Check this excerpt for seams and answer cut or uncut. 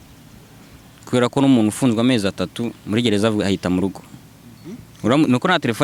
uncut